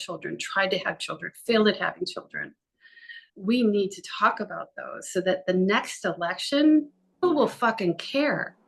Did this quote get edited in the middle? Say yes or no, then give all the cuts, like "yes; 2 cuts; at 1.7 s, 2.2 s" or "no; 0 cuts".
yes; 1 cut; at 7.2 s